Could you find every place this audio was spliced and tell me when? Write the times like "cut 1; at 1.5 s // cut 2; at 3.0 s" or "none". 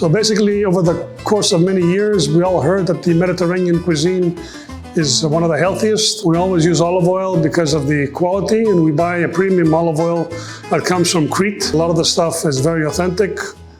cut 1; at 6.1 s // cut 2; at 11.7 s